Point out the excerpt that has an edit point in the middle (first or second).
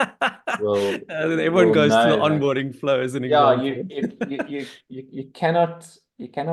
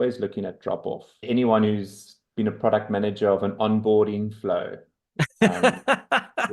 second